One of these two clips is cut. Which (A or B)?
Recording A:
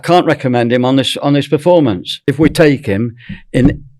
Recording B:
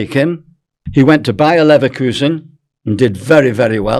A